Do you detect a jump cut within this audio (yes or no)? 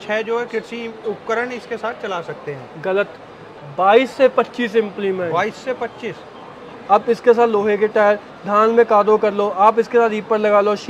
no